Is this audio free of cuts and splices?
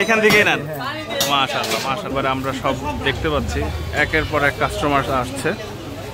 no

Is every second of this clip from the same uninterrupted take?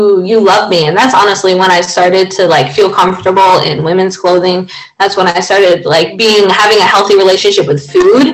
yes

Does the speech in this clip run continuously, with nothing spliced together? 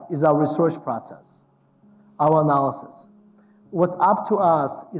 yes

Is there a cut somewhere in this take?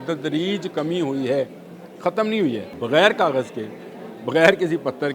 yes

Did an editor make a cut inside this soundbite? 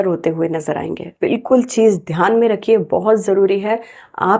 yes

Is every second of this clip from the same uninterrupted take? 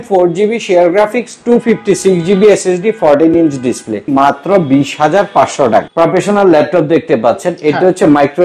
no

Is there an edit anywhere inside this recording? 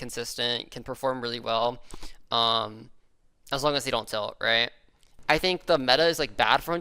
yes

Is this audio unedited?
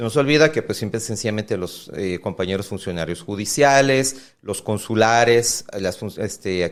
yes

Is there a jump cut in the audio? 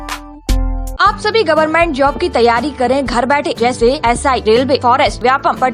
yes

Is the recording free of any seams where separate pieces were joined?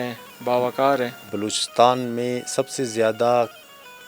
no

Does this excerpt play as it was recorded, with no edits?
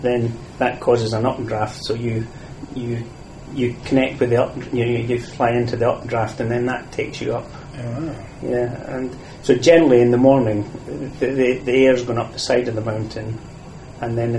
yes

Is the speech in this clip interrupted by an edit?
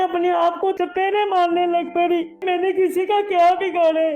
yes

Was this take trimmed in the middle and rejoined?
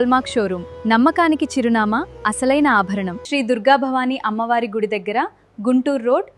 yes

